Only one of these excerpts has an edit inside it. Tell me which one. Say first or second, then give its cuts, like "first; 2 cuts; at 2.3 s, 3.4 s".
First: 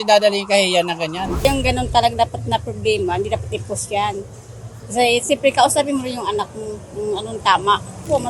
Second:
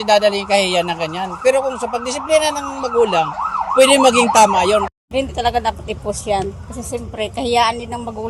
first; 1 cut; at 1.3 s